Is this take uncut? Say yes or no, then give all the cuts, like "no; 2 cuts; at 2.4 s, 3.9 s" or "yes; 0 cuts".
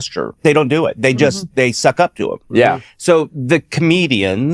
yes; 0 cuts